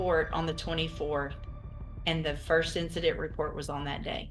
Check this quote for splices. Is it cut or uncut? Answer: uncut